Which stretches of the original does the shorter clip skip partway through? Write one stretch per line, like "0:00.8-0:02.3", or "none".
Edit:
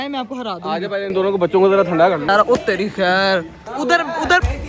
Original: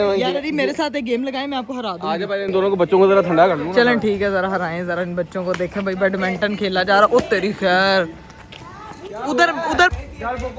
0:03.6-0:06.9
0:08.2-0:09.1